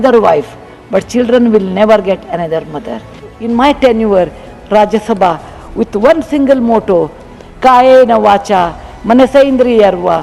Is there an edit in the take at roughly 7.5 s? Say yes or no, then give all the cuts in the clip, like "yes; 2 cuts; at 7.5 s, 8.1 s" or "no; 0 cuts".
no; 1 cut; at 3.4 s